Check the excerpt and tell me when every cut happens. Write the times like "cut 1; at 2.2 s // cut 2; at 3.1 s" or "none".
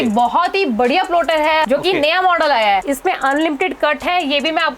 cut 1; at 1.7 s // cut 2; at 2.9 s